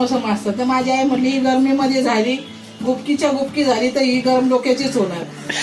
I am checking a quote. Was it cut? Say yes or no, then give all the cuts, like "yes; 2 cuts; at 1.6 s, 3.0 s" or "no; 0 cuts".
no; 0 cuts